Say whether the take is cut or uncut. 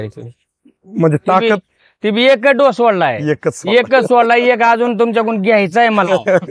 uncut